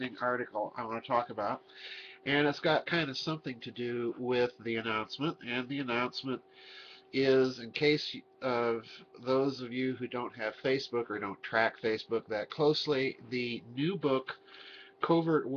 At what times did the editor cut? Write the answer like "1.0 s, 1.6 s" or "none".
none